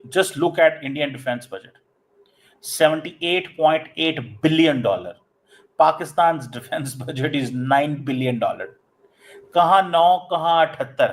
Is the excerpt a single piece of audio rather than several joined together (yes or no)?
yes